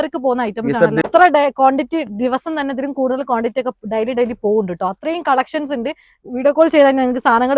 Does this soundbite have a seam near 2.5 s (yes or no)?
no